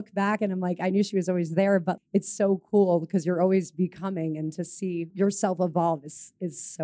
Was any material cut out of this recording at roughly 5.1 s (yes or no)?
yes